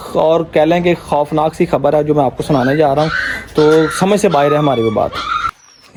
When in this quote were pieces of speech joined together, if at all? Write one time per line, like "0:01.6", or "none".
none